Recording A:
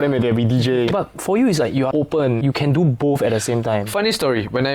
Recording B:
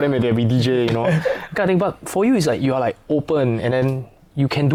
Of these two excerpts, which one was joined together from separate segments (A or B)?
A